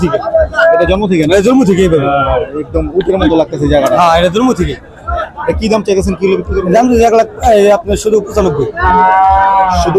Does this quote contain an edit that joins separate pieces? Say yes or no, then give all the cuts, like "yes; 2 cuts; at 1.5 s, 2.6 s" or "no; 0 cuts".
no; 0 cuts